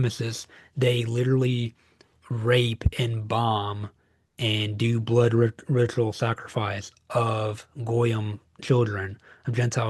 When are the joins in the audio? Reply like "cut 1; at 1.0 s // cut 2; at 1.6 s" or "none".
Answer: none